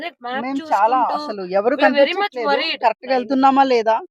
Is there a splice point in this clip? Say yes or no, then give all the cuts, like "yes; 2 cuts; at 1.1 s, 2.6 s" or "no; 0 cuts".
no; 0 cuts